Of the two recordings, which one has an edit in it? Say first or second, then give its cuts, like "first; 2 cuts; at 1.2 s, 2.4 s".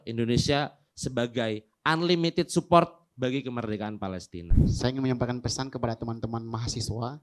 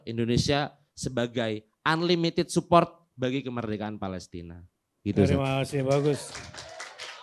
first; 1 cut; at 4.6 s